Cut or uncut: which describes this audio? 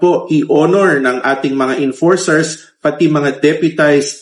uncut